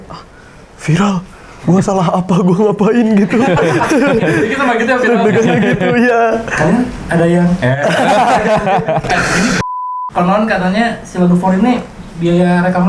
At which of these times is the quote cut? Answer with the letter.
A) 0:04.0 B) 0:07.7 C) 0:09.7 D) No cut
C